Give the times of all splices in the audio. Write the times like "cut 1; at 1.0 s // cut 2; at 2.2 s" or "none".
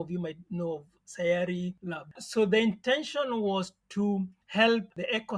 cut 1; at 2.2 s